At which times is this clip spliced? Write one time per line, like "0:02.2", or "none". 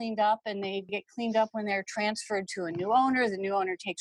none